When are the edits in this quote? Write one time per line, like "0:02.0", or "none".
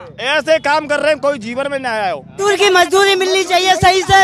0:02.4